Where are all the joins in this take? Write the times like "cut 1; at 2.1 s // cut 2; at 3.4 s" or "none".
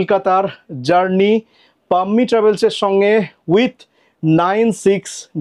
none